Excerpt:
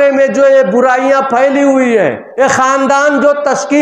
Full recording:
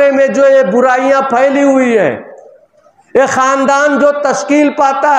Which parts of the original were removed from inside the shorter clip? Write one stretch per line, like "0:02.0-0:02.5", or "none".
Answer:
0:02.2-0:03.0